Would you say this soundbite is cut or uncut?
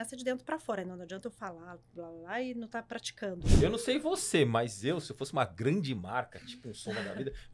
cut